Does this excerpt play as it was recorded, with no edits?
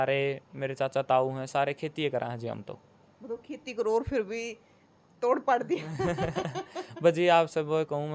yes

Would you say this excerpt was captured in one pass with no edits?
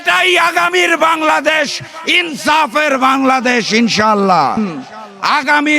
no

